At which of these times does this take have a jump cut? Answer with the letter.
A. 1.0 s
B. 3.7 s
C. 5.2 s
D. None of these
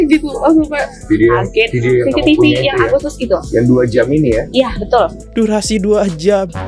C